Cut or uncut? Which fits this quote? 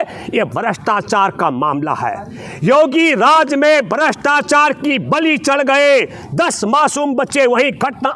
uncut